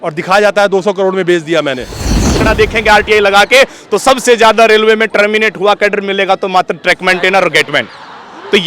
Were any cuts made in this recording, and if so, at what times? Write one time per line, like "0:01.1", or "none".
0:02.4